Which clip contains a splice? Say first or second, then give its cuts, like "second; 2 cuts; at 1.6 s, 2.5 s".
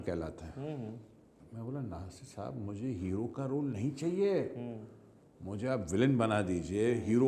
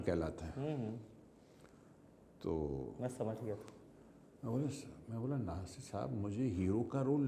first; 1 cut; at 1.4 s